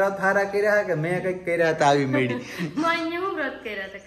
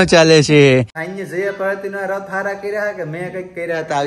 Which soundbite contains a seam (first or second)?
second